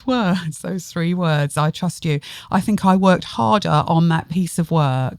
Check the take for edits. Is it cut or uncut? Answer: uncut